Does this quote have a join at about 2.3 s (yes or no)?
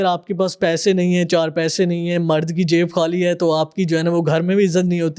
no